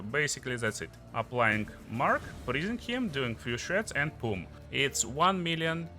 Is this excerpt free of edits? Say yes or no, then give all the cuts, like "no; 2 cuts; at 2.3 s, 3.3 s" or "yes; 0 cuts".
no; 2 cuts; at 1.0 s, 4.5 s